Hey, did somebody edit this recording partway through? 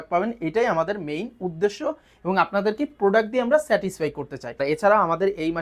yes; 1 cut; at 4.6 s

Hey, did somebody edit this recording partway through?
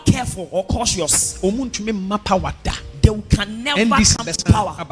no; 0 cuts

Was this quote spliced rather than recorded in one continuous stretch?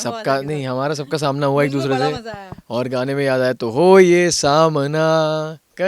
no; 0 cuts

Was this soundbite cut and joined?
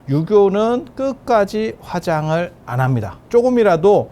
yes; 1 cut; at 3.2 s

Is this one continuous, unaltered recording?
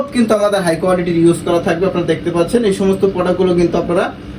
yes; 0 cuts

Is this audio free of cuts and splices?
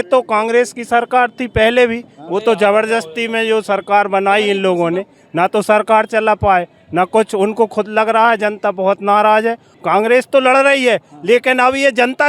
no; 1 cut; at 9.7 s

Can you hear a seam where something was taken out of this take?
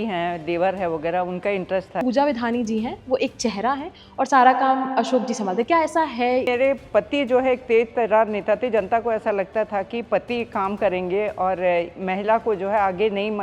yes; 2 cuts; at 2.0 s, 6.5 s

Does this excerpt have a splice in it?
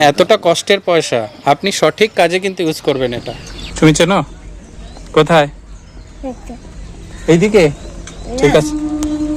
yes; 1 cut; at 3.3 s

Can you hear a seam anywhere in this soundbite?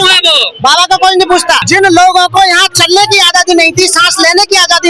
yes; 1 cut; at 1.6 s

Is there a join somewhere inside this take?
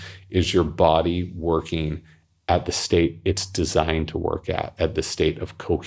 no; 0 cuts

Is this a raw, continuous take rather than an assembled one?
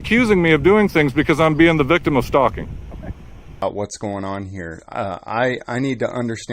no; 1 cut; at 3.5 s

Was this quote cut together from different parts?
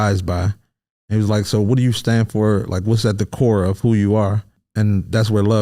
yes; 1 cut; at 4.6 s

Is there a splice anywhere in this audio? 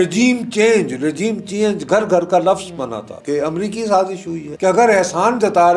yes; 2 cuts; at 3.1 s, 4.4 s

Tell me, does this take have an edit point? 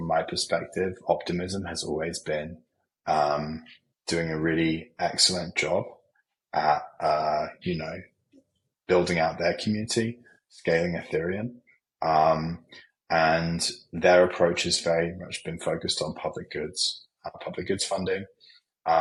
no; 0 cuts

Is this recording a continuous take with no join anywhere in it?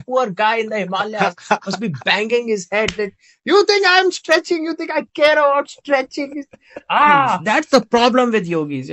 no; 1 cut; at 7.4 s

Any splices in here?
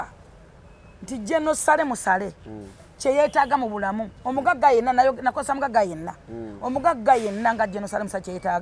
no; 0 cuts

